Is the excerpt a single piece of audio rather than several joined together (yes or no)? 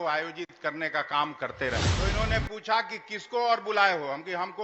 no